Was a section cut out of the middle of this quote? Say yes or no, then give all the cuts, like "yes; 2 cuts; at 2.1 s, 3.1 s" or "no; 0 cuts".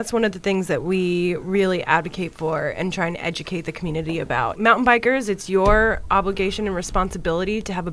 yes; 1 cut; at 4.5 s